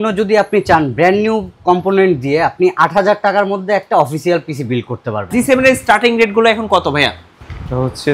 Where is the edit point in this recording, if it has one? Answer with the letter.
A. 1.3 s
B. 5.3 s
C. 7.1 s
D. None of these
B